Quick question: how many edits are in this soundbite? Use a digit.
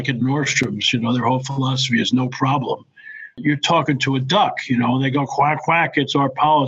1